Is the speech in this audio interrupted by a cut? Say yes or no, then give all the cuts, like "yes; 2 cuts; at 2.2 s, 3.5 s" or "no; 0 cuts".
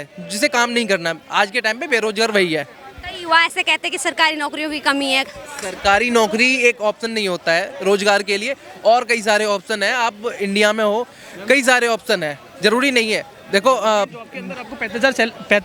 no; 0 cuts